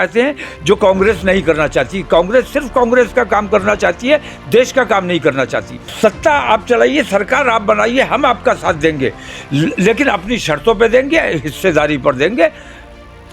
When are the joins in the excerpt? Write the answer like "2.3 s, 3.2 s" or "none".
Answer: 5.8 s